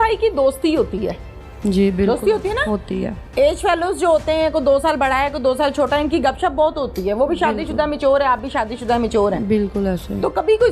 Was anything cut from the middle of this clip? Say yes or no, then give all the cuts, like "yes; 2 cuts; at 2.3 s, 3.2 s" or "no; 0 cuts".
no; 0 cuts